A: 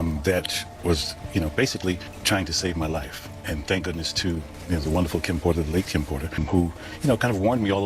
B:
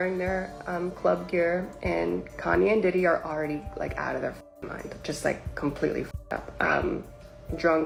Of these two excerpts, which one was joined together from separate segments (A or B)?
A